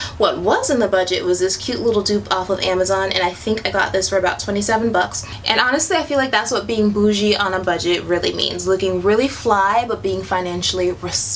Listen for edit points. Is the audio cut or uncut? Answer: cut